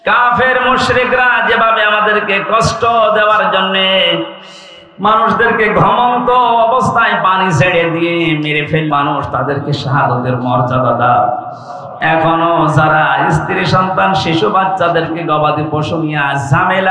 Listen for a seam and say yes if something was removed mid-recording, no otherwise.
yes